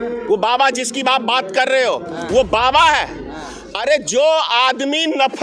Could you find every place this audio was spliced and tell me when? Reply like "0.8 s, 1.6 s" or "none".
none